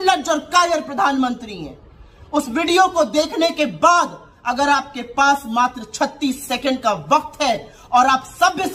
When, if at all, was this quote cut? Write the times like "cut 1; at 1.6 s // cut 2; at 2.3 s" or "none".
none